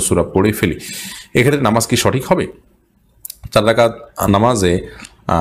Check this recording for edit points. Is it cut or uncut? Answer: uncut